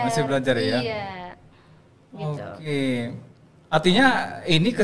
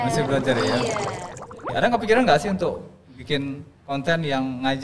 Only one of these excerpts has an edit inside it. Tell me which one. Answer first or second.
second